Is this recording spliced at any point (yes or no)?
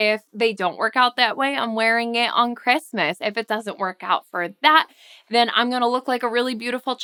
no